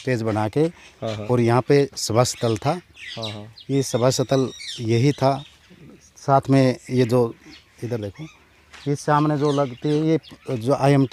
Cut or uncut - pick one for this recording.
uncut